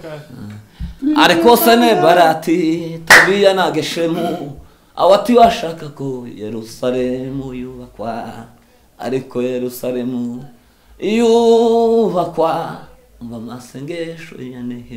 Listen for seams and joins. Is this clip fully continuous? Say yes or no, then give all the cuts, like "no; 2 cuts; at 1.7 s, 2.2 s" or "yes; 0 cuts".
yes; 0 cuts